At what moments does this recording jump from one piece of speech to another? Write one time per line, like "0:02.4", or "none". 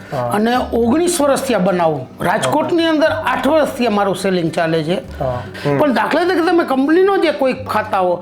0:05.5